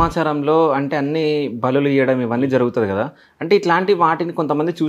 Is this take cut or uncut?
uncut